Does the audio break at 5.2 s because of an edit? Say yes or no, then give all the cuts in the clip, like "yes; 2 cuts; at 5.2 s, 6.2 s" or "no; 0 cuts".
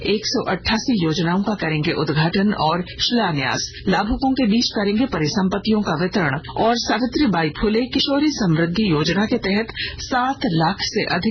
no; 2 cuts; at 3.2 s, 6.4 s